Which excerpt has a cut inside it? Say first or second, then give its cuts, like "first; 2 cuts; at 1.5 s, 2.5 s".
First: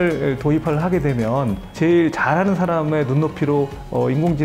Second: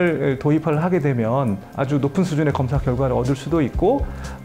second; 1 cut; at 1.7 s